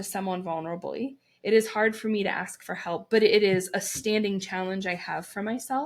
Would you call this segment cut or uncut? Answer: uncut